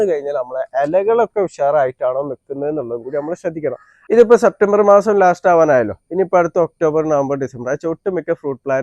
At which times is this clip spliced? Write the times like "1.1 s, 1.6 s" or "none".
3.9 s